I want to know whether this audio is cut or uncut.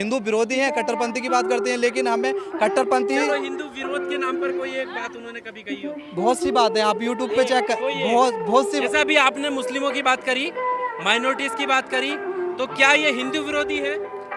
uncut